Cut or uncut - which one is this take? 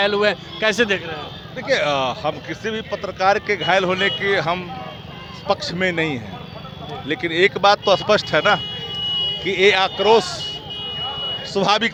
uncut